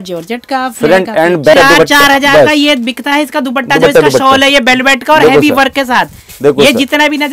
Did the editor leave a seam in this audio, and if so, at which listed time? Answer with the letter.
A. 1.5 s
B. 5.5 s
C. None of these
A